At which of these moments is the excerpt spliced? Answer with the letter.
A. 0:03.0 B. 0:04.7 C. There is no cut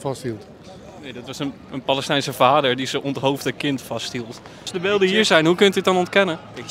B